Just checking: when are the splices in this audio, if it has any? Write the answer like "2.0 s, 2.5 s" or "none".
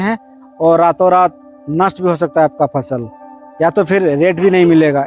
none